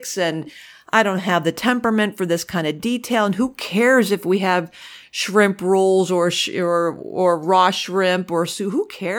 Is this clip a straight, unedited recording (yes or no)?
yes